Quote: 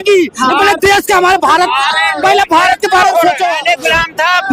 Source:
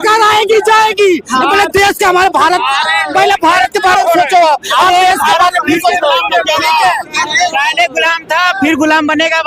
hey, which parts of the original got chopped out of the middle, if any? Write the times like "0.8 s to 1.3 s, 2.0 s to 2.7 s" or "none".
4.4 s to 7.6 s